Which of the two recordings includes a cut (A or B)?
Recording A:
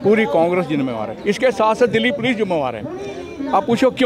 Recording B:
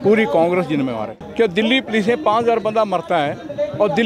B